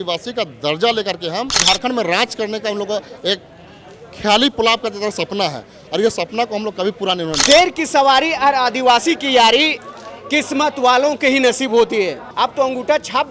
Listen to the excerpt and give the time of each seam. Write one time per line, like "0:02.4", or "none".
0:01.6
0:07.3
0:12.2